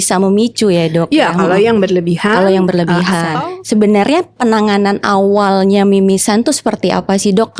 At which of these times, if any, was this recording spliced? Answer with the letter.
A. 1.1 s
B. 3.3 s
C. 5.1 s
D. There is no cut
B